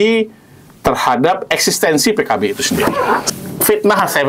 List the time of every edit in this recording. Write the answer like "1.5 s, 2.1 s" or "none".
3.3 s